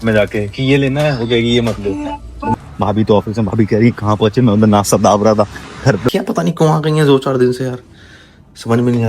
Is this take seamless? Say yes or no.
no